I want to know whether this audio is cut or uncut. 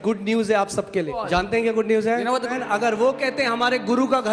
cut